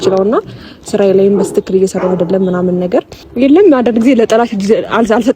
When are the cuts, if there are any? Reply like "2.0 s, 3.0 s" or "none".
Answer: 3.2 s